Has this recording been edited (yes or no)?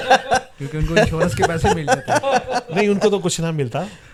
no